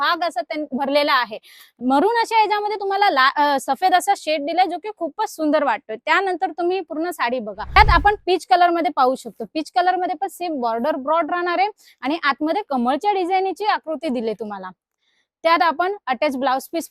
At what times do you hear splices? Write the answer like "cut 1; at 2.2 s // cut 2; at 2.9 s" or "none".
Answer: cut 1; at 7.8 s